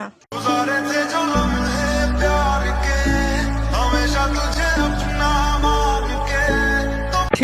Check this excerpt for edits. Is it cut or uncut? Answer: uncut